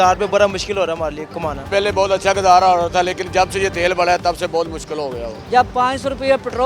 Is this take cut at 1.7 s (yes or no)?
yes